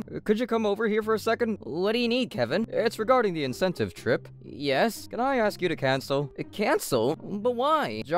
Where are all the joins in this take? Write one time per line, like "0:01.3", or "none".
none